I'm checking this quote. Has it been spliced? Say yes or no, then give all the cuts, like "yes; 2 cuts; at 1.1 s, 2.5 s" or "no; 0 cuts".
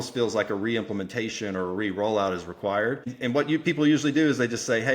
yes; 1 cut; at 3.2 s